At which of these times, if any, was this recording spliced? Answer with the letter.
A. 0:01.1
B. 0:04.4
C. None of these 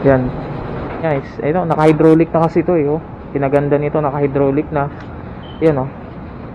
A